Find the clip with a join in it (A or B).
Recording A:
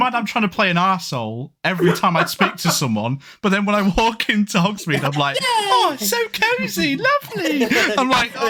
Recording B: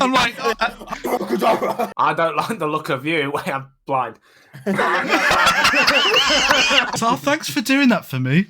B